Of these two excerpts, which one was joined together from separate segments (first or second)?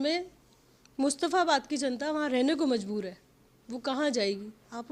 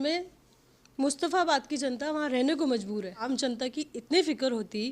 second